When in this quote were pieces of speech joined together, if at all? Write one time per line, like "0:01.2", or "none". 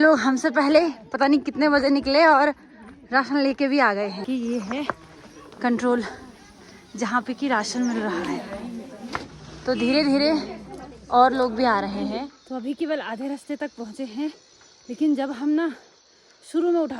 0:04.2
0:09.3
0:12.2

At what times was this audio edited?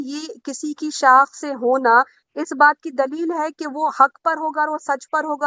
none

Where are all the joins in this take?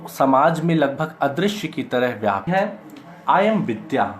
0:02.5

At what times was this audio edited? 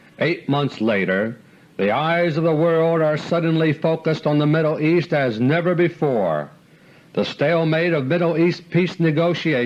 0:01.0

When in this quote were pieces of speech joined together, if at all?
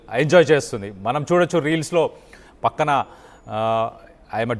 0:01.1
0:01.9

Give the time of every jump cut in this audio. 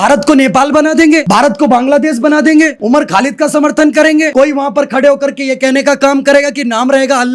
0:01.2
0:02.8
0:04.3

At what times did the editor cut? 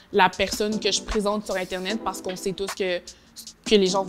none

